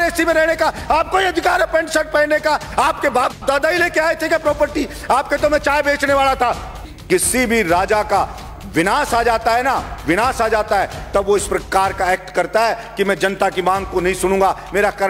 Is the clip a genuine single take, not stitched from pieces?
no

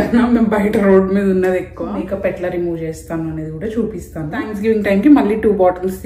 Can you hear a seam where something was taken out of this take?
yes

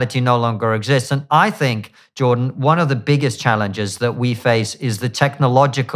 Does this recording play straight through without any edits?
yes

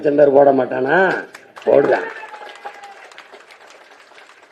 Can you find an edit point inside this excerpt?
no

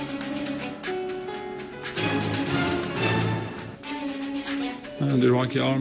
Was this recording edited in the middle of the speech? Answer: no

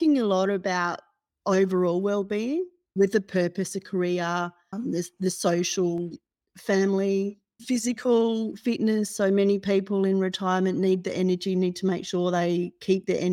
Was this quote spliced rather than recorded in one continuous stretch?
yes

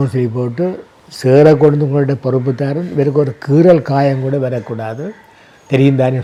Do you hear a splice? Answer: no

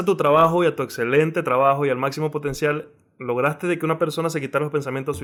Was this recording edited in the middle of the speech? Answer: no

